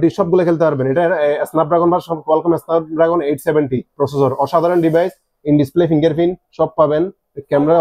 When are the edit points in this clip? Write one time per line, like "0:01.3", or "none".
none